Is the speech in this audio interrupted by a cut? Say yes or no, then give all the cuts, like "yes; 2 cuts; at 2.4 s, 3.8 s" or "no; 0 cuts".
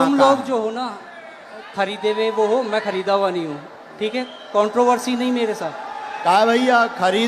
no; 0 cuts